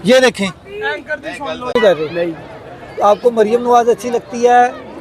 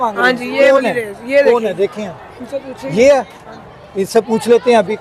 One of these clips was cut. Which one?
first; 1 cut; at 1.8 s

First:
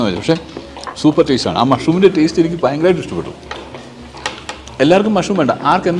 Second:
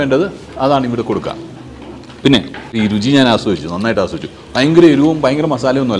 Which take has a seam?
second; 1 cut; at 2.8 s

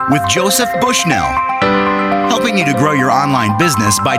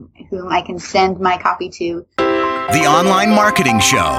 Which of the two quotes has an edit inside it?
second; 1 cut; at 2.1 s

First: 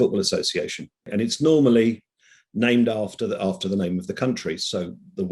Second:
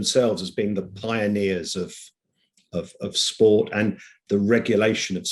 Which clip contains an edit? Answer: first; 1 cut; at 1.0 s

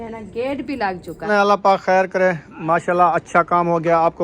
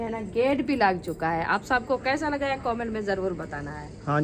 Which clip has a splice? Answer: first; 1 cut; at 1.1 s

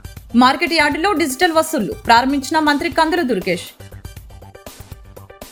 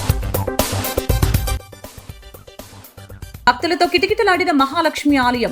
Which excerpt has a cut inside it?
second; 1 cut; at 3.3 s

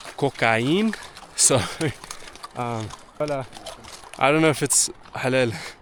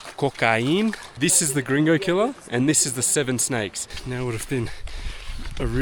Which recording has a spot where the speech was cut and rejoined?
second; 2 cuts; at 1.1 s, 4.0 s

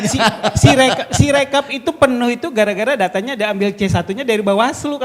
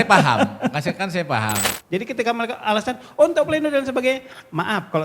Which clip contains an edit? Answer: second; 1 cut; at 1.7 s

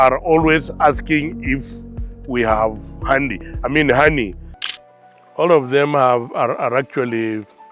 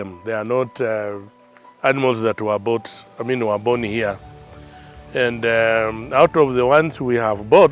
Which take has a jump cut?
first; 1 cut; at 4.5 s

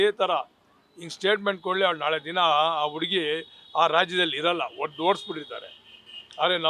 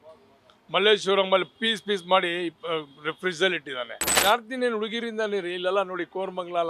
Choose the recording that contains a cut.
second; 1 cut; at 4.1 s

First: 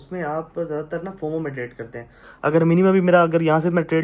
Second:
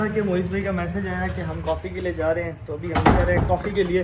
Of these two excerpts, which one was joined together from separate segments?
first; 1 cut; at 2.2 s

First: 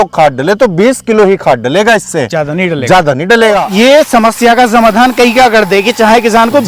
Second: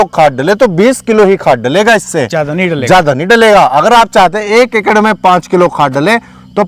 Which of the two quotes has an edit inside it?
first; 1 cut; at 3.6 s

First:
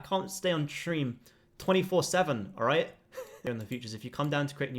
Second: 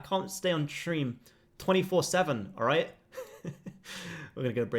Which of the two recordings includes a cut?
first; 1 cut; at 3.4 s

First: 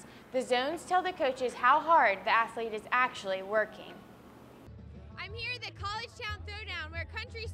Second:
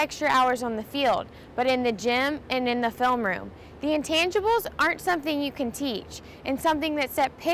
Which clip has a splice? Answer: first; 1 cut; at 4.5 s

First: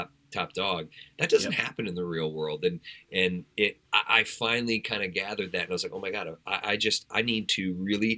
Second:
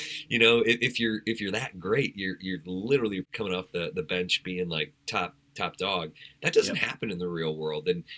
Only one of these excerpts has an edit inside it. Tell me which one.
second; 1 cut; at 3.3 s

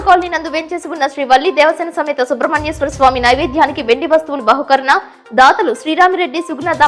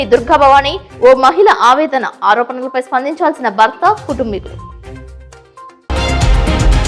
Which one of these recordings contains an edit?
second; 1 cut; at 5.9 s

